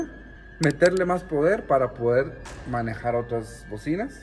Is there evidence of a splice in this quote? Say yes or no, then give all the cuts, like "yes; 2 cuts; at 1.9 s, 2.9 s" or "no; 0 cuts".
no; 0 cuts